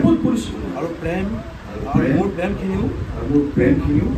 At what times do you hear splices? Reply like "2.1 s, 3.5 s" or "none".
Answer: none